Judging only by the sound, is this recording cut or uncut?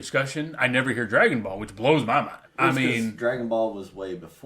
cut